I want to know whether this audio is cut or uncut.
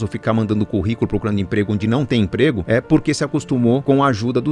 uncut